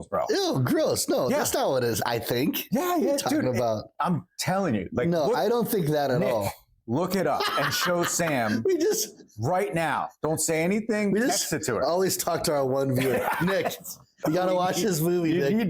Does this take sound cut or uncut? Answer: cut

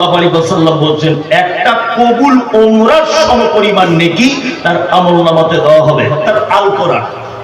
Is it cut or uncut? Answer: cut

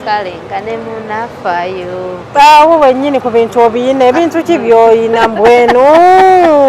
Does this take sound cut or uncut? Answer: uncut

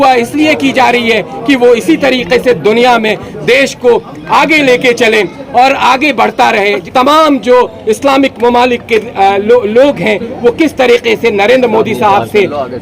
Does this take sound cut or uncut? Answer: cut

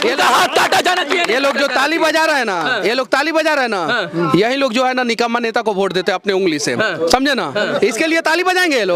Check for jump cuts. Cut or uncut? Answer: uncut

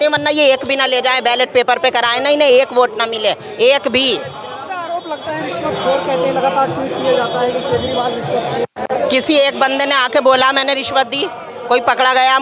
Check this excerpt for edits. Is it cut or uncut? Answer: uncut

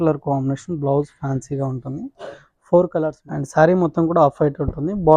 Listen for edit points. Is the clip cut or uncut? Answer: cut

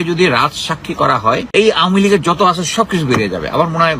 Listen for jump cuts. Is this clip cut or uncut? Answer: cut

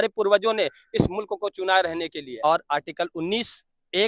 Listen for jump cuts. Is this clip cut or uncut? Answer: cut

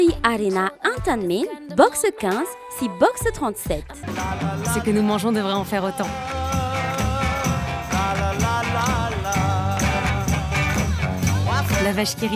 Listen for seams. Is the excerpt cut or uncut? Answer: uncut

